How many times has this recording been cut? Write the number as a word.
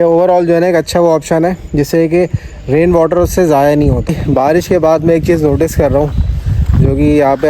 one